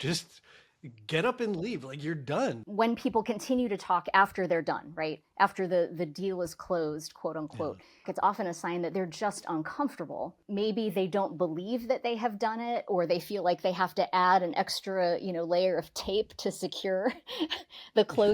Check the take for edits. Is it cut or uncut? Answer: cut